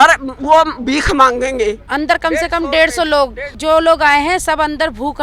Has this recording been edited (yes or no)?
yes